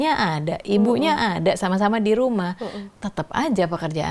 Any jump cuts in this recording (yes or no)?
no